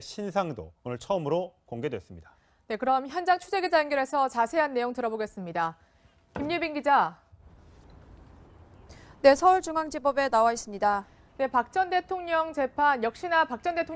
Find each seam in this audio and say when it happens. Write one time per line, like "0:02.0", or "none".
none